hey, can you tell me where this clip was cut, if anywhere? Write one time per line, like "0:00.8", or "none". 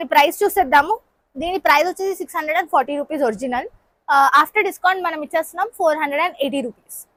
none